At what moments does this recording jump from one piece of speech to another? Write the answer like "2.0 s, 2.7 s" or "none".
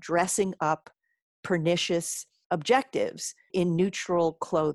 2.4 s, 3.5 s